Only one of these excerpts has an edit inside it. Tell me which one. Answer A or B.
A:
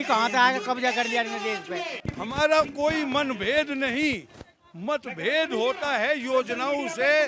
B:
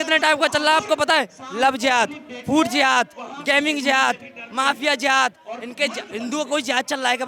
A